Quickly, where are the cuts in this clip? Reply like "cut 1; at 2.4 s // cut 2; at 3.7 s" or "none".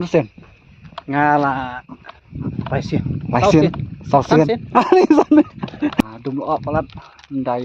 cut 1; at 6.0 s